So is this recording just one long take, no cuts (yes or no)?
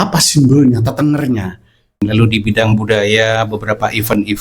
no